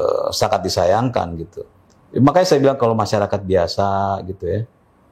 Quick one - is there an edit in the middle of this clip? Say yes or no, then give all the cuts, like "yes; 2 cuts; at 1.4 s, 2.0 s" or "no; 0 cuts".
no; 0 cuts